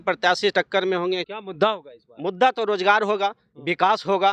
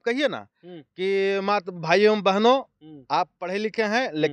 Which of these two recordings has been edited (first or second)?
first